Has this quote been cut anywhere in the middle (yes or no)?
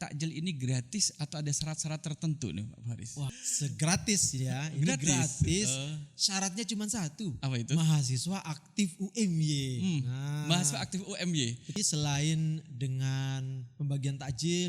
yes